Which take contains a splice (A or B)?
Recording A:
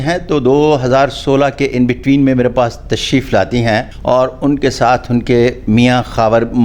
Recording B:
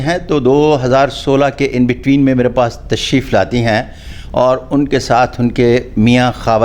A